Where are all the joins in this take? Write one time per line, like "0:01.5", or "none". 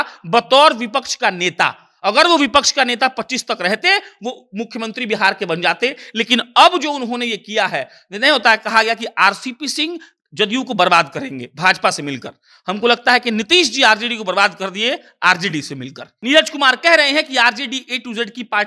0:16.1